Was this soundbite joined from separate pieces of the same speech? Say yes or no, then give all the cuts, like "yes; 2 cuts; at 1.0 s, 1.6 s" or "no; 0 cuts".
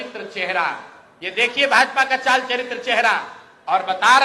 no; 0 cuts